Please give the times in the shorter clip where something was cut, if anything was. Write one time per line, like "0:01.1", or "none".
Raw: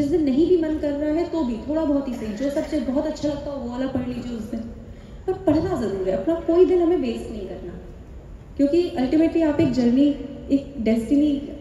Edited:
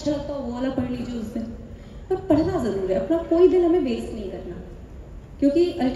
none